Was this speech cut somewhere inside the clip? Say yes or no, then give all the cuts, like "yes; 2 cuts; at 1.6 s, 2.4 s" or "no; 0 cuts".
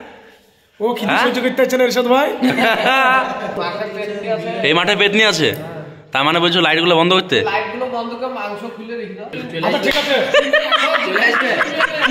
yes; 2 cuts; at 3.6 s, 9.3 s